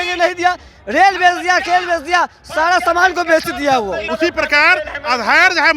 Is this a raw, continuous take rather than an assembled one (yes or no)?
no